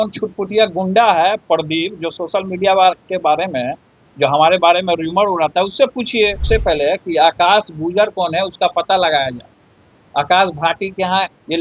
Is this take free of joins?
no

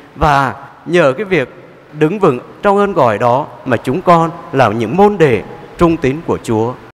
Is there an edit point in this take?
no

